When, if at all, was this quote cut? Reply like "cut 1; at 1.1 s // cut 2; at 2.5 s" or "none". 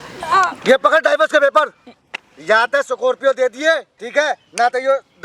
cut 1; at 2.0 s // cut 2; at 4.0 s